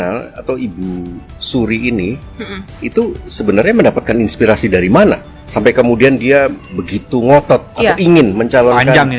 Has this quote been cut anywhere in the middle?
yes; 1 cut; at 7.7 s

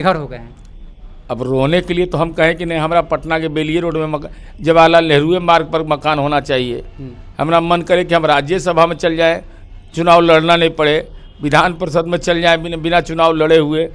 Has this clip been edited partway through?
no; 0 cuts

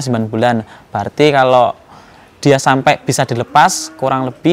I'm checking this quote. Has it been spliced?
no; 0 cuts

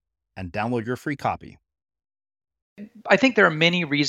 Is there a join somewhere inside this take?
yes; 1 cut; at 2.9 s

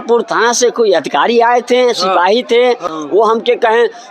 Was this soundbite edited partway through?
yes; 1 cut; at 2.9 s

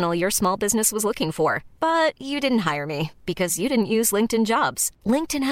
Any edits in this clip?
no; 0 cuts

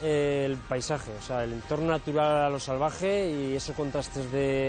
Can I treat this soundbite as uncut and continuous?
yes; 0 cuts

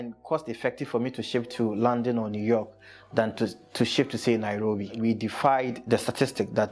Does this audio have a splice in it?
yes; 2 cuts; at 5.0 s, 5.8 s

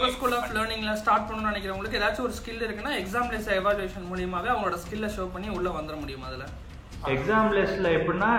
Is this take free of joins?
no; 1 cut; at 7.0 s

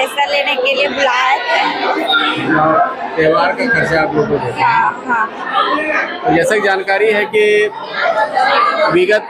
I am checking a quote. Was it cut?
no; 0 cuts

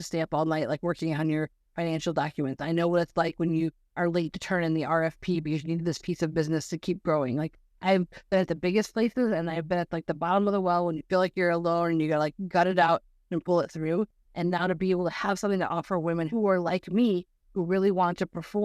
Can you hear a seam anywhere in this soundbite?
yes; 1 cut; at 16.3 s

